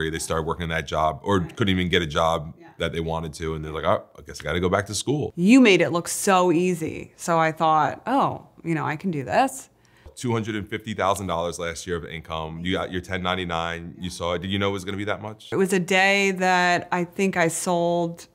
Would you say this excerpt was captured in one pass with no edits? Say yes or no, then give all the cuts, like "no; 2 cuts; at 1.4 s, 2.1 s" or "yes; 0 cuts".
no; 3 cuts; at 5.3 s, 10.1 s, 15.5 s